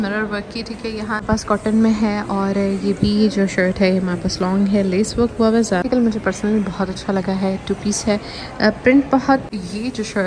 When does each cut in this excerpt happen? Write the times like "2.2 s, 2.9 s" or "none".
1.2 s, 5.8 s, 9.4 s